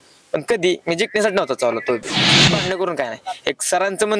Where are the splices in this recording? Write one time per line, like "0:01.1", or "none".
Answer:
0:02.5